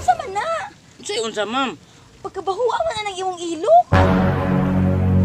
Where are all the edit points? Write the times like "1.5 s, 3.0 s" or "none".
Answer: 3.9 s